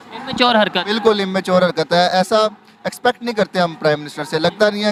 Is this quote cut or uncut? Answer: uncut